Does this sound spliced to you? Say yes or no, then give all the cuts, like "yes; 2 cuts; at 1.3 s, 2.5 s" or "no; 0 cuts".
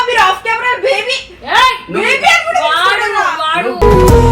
no; 0 cuts